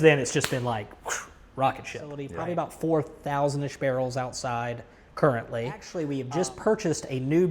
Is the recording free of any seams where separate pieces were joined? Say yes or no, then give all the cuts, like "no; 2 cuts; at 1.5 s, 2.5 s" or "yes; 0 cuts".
no; 2 cuts; at 2.3 s, 5.9 s